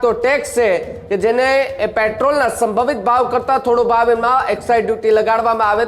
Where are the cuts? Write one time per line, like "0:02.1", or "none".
none

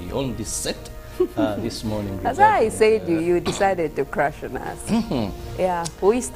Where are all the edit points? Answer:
0:03.3

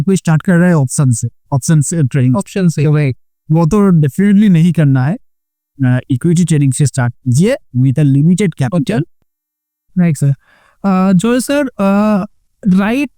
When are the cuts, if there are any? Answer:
0:09.2

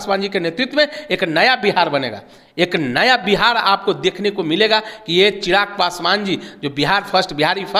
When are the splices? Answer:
none

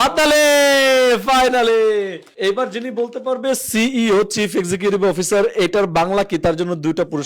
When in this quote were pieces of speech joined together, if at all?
0:02.2

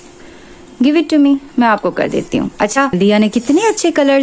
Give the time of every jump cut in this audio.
0:03.0

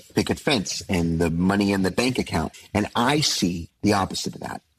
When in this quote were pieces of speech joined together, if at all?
0:03.7

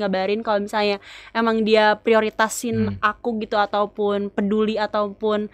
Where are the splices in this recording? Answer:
none

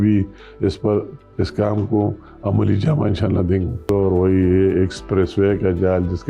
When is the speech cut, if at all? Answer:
0:03.9

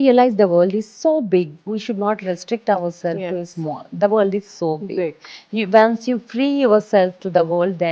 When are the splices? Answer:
none

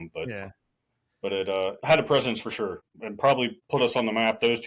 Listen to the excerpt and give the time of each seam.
0:01.8
0:02.8
0:03.6

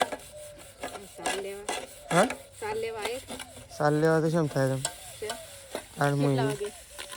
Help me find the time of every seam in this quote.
none

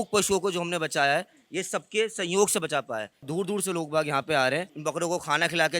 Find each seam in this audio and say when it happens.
0:03.3
0:04.7

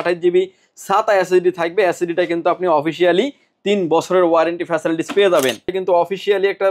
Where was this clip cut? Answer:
0:05.7

